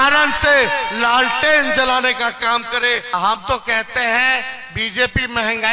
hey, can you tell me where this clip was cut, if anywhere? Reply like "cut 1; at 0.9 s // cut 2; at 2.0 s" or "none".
cut 1; at 3.0 s